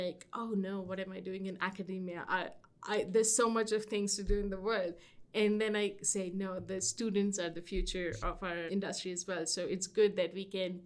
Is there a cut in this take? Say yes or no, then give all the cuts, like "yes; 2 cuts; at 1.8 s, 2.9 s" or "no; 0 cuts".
yes; 1 cut; at 8.7 s